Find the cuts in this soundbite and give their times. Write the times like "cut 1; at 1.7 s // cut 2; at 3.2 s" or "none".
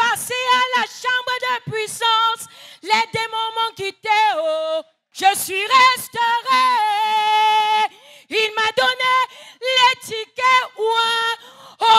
cut 1; at 5.0 s